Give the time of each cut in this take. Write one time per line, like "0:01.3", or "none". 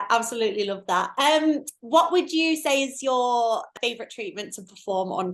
0:01.1
0:03.7